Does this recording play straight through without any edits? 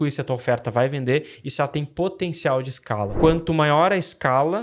no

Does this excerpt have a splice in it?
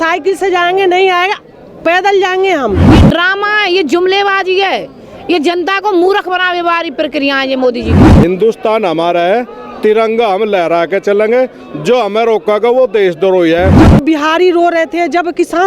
yes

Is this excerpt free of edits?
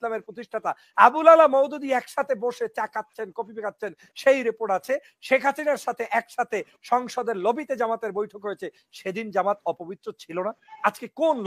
yes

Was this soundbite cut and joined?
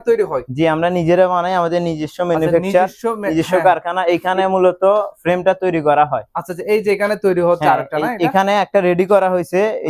no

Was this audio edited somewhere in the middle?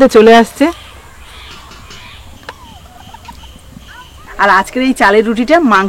yes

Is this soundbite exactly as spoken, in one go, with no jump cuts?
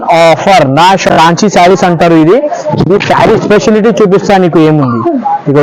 no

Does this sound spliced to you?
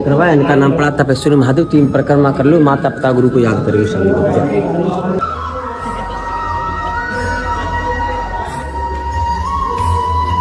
no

